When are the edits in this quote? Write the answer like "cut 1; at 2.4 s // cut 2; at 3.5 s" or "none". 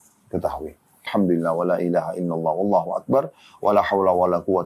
cut 1; at 1.1 s